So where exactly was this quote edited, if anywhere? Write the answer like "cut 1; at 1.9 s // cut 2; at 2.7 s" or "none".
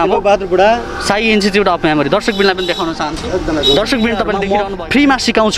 cut 1; at 4.4 s

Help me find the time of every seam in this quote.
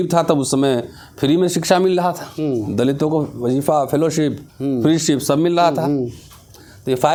none

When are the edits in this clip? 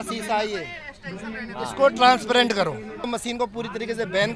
cut 1; at 3.1 s

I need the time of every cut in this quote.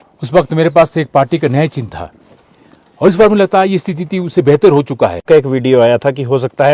cut 1; at 5.2 s

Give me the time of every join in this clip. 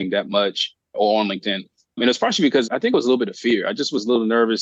none

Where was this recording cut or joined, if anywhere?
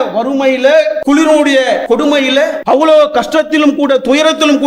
cut 1; at 1.0 s // cut 2; at 2.0 s

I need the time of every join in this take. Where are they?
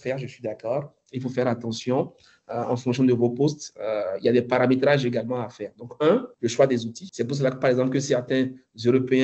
cut 1; at 6.3 s // cut 2; at 7.0 s

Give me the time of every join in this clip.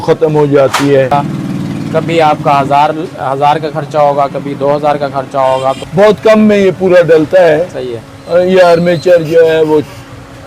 cut 1; at 1.1 s // cut 2; at 5.8 s

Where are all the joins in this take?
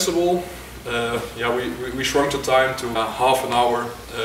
cut 1; at 2.9 s

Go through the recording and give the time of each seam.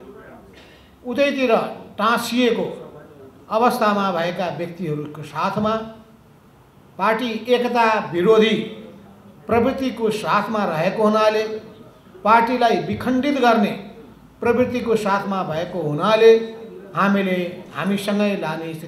none

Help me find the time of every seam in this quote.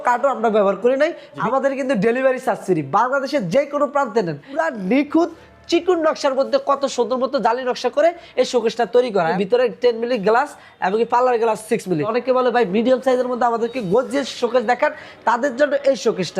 cut 1; at 1.3 s // cut 2; at 4.6 s // cut 3; at 9.3 s // cut 4; at 12.1 s

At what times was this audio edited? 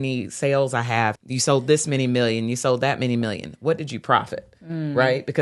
cut 1; at 1.2 s

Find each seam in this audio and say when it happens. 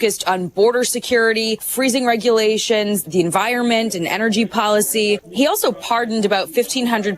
cut 1; at 1.7 s // cut 2; at 3.0 s // cut 3; at 5.3 s

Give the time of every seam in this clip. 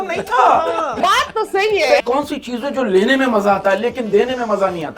cut 1; at 1.0 s // cut 2; at 2.0 s

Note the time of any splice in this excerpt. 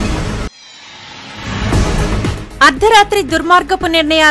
none

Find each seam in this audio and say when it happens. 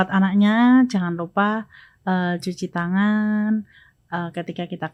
none

